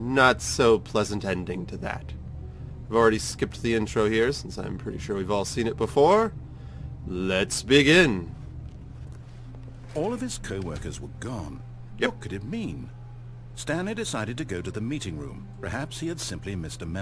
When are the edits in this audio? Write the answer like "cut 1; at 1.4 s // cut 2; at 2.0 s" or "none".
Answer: cut 1; at 15.4 s